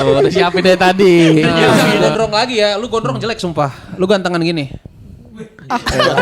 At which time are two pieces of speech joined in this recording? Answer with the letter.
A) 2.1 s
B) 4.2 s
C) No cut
A